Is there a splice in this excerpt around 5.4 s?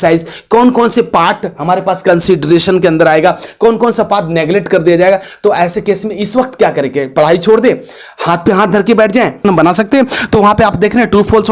no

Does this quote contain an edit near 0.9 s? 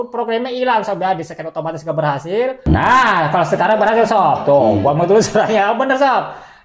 no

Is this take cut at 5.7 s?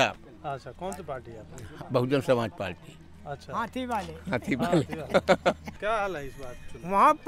no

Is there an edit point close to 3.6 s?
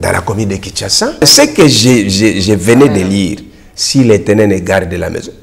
no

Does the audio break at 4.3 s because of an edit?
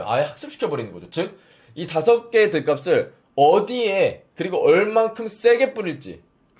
yes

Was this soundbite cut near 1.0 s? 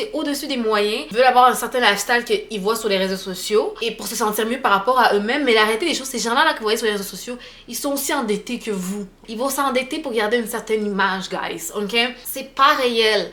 yes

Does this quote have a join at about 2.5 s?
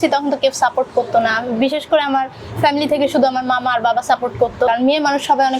no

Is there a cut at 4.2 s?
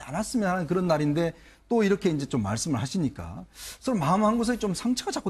no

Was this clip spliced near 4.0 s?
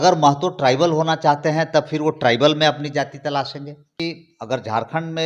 yes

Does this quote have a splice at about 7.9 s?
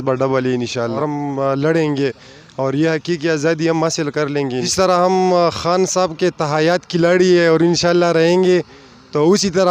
no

